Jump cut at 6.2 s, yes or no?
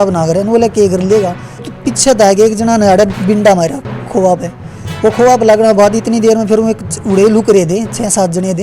no